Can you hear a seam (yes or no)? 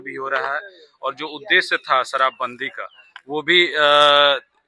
no